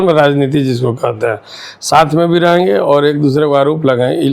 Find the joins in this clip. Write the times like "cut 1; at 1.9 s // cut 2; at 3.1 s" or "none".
none